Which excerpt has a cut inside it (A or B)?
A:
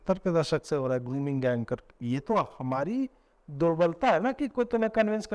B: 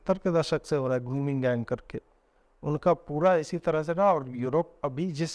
A